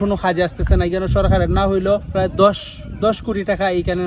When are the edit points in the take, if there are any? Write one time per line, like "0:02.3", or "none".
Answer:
0:02.1